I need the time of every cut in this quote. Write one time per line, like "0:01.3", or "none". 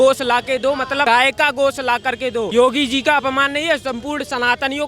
0:01.0
0:02.5